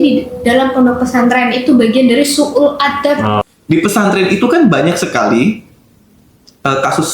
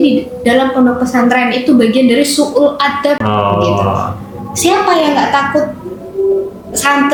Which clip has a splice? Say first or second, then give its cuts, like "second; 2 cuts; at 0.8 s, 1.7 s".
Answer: first; 1 cut; at 3.4 s